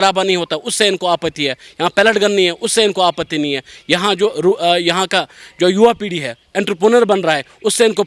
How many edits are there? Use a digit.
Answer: 0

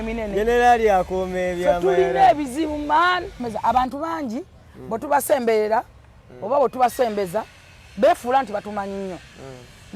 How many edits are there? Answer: 1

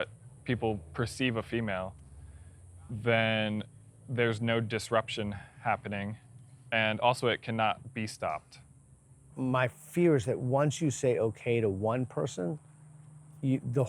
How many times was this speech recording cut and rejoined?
1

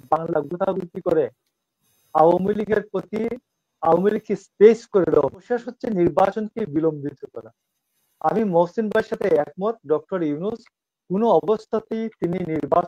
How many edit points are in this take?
1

